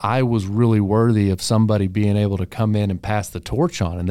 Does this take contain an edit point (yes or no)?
no